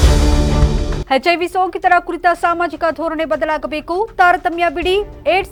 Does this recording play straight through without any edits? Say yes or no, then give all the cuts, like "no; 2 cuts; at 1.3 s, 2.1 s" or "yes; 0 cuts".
yes; 0 cuts